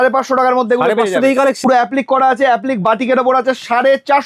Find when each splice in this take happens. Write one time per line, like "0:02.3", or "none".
0:01.6